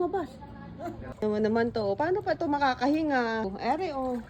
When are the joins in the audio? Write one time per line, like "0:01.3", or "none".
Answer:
0:01.0